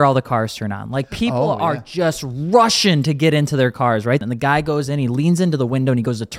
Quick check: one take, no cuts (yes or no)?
no